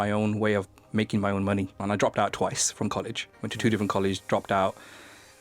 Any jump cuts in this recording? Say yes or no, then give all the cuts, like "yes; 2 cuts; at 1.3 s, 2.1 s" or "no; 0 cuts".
yes; 1 cut; at 1.8 s